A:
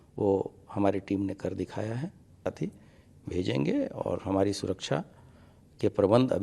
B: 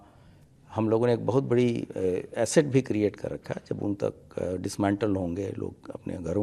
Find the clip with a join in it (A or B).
A